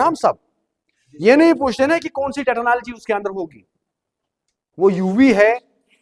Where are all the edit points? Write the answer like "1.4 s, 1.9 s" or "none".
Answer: none